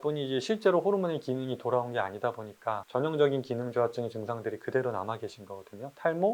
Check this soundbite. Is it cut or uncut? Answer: uncut